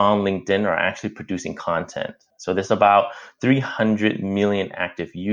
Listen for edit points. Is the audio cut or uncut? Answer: cut